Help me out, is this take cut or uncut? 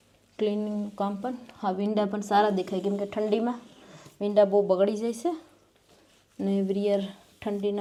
uncut